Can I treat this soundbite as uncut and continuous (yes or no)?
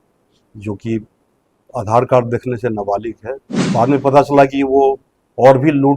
no